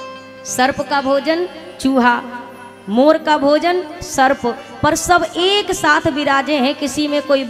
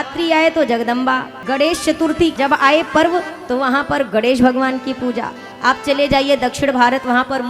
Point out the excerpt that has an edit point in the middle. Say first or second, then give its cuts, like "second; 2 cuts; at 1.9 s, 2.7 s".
second; 2 cuts; at 1.3 s, 2.3 s